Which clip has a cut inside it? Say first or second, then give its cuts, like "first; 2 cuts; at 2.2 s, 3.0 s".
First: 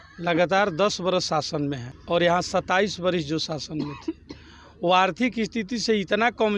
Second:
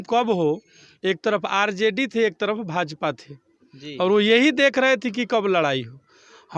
first; 1 cut; at 1.9 s